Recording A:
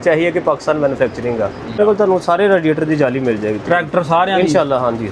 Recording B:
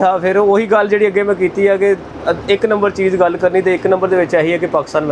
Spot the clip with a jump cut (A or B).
A